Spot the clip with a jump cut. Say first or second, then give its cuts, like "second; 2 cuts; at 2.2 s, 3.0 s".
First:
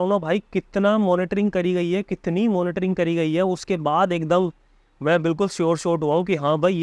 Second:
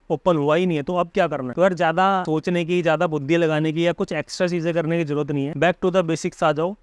second; 3 cuts; at 1.4 s, 2.2 s, 5.5 s